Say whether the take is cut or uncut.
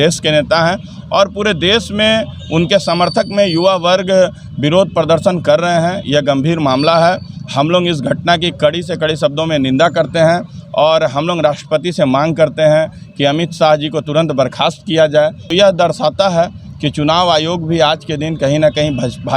cut